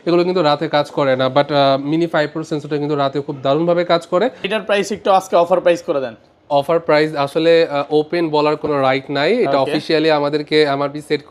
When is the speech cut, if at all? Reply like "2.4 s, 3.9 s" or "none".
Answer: 4.5 s

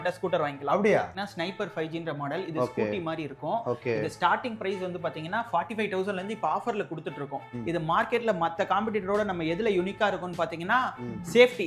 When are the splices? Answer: 1.1 s, 7.5 s

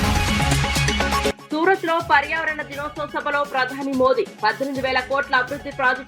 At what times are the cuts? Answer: 1.3 s

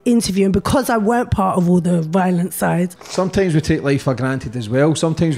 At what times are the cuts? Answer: 3.0 s

